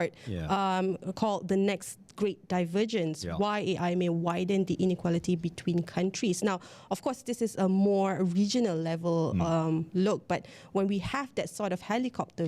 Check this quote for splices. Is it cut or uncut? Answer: uncut